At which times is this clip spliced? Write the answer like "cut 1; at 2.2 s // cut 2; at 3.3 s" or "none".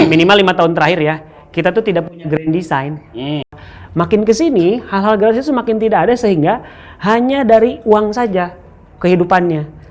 cut 1; at 3.6 s